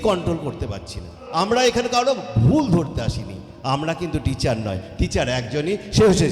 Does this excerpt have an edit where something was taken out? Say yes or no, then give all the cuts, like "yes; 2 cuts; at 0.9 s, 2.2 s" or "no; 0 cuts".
yes; 1 cut; at 1.2 s